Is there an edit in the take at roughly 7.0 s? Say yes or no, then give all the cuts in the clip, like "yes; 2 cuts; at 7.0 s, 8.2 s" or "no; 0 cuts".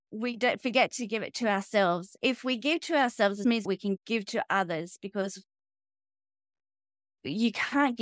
no; 2 cuts; at 2.1 s, 3.5 s